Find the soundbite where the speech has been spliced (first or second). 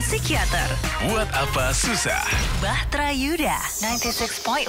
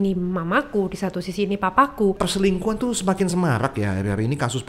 second